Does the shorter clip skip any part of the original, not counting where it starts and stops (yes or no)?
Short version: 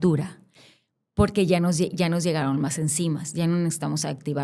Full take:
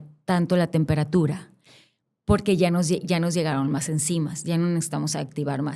no